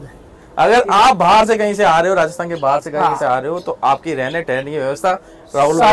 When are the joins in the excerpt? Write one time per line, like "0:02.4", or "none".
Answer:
none